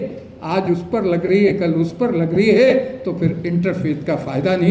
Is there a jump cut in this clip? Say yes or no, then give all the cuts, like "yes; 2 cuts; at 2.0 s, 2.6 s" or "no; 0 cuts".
no; 0 cuts